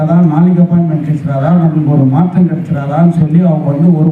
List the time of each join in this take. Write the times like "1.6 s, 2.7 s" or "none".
none